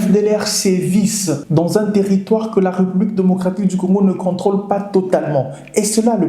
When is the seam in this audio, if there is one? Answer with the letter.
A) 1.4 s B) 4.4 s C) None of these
A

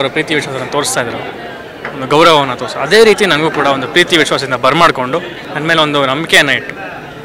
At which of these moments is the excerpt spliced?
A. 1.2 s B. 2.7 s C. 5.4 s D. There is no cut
C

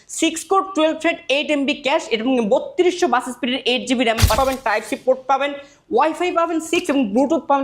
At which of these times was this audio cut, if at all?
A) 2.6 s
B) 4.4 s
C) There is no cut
B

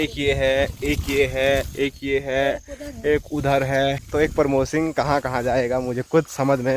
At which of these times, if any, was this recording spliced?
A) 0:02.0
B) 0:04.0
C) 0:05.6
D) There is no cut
B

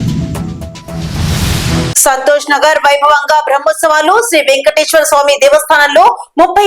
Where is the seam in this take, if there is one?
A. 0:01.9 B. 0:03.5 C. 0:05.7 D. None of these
A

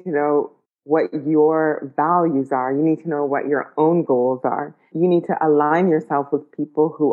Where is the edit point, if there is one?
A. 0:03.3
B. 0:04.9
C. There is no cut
B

